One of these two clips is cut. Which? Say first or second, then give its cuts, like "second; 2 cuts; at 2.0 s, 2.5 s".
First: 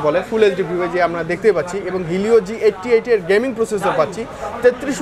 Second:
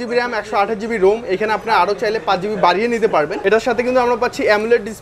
second; 1 cut; at 3.3 s